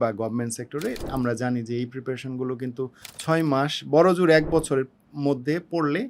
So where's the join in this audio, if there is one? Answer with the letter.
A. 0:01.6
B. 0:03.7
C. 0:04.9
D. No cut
D